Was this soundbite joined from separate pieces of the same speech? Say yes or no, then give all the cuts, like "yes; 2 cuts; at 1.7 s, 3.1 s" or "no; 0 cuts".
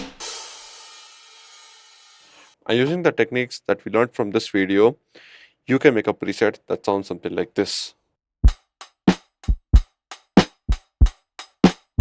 no; 0 cuts